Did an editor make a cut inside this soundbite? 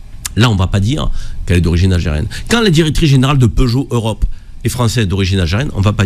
no; 0 cuts

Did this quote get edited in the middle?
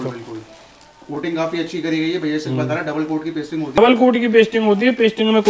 yes; 1 cut; at 3.8 s

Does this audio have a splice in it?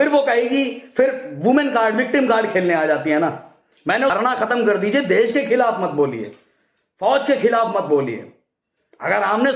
yes; 1 cut; at 4.1 s

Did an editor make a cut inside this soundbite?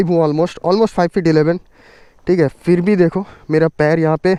no; 0 cuts

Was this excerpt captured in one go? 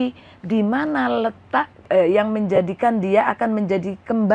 no; 1 cut; at 1.9 s

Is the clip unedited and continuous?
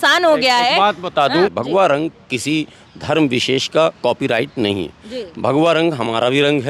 no; 1 cut; at 1.5 s

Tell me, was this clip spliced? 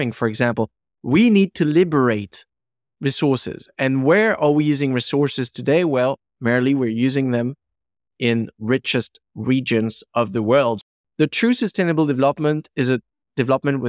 yes; 1 cut; at 10.8 s

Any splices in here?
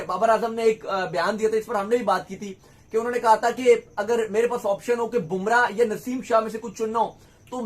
no; 0 cuts

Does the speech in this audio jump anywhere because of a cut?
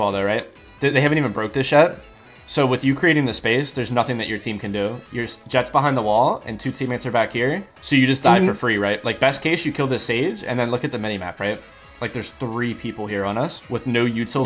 no; 0 cuts

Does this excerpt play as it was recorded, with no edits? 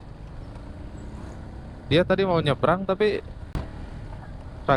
yes; 0 cuts

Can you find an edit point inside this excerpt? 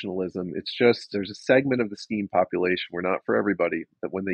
yes; 1 cut; at 1.1 s

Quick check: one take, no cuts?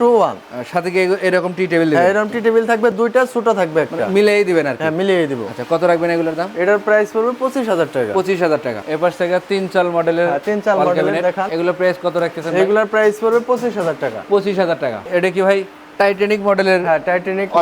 yes; 0 cuts

